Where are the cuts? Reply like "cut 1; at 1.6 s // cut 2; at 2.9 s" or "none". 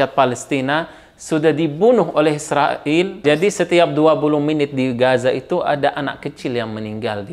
cut 1; at 3.2 s